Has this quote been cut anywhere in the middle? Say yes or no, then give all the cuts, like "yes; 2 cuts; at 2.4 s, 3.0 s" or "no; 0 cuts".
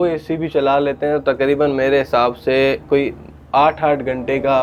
no; 0 cuts